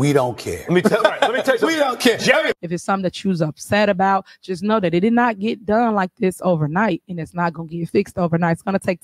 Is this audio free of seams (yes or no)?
no